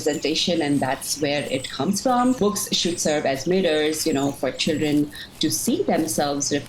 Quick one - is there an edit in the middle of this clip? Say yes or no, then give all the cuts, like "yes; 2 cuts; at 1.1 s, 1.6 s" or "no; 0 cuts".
yes; 1 cut; at 2.4 s